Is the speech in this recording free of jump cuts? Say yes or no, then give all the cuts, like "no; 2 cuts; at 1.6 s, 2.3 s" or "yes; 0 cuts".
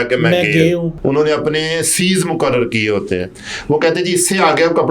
no; 1 cut; at 0.9 s